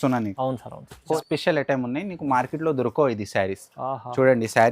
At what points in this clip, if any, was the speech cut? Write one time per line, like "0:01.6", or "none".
0:01.1